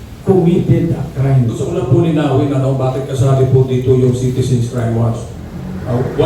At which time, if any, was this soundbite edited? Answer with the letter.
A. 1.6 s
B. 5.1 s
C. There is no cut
A